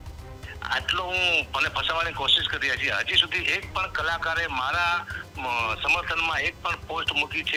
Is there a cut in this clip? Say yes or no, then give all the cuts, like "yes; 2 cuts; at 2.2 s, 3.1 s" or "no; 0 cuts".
no; 0 cuts